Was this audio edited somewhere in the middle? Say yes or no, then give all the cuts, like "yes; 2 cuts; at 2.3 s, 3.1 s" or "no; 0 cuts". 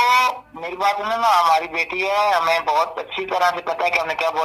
no; 0 cuts